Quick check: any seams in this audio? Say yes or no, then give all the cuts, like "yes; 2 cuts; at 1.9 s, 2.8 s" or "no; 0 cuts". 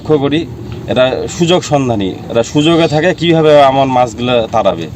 no; 0 cuts